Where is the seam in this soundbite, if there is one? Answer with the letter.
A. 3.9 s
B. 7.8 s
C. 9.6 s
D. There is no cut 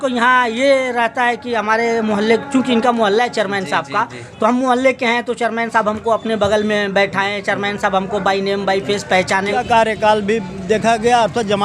C